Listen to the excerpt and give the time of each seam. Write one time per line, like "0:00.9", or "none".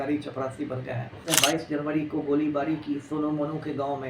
0:01.2